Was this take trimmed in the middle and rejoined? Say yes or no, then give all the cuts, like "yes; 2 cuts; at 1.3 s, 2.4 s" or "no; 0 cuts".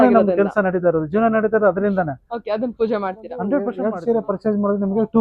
yes; 1 cut; at 3.8 s